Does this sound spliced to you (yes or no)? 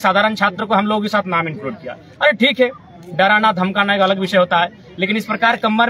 no